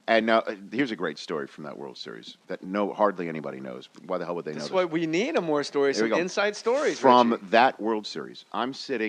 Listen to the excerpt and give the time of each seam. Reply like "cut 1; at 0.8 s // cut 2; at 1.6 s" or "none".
cut 1; at 2.6 s